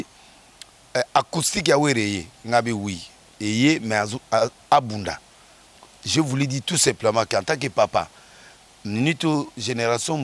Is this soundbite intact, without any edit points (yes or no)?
yes